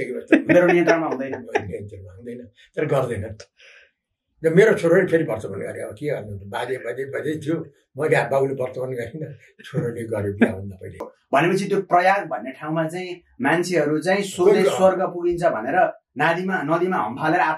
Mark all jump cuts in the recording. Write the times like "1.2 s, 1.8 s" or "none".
11.2 s

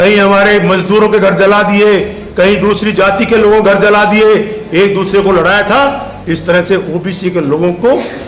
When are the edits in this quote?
none

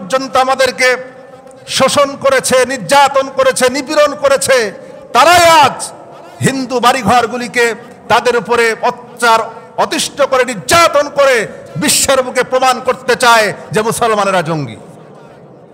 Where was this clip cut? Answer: none

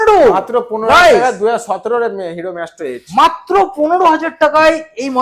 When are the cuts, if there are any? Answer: none

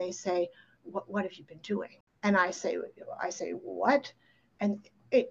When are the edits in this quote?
2.0 s

